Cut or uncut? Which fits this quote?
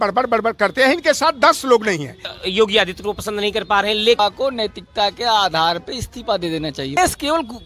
cut